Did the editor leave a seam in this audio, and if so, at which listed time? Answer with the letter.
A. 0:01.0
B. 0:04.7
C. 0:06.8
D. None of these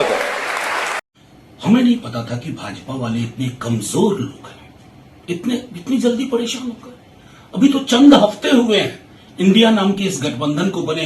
A